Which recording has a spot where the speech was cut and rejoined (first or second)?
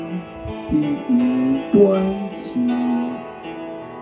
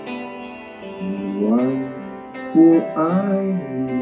second